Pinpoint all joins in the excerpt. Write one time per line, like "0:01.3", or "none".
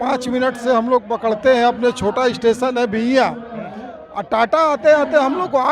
none